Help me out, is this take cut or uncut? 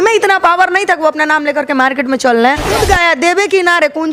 cut